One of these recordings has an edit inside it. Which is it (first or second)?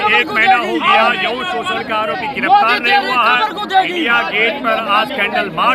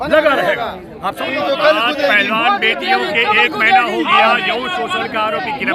second